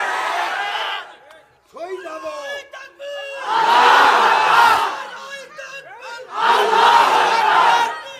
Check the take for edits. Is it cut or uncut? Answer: uncut